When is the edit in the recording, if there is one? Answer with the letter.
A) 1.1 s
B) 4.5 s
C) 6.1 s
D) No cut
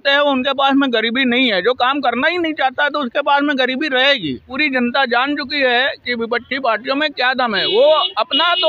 B